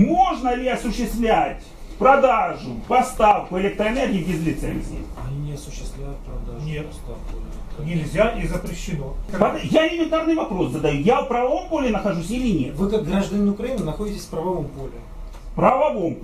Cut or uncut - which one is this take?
cut